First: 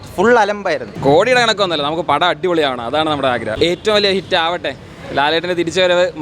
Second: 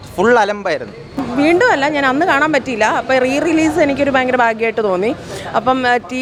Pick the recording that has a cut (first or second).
first